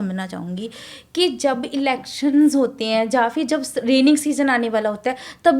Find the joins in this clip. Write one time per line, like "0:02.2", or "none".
none